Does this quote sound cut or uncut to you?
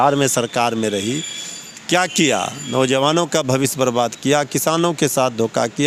uncut